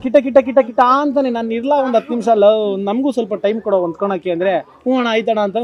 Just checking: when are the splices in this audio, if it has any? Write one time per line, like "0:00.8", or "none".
none